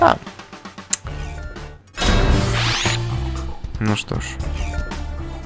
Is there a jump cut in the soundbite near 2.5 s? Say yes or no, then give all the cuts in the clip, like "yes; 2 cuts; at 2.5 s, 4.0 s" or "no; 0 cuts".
yes; 1 cut; at 2.5 s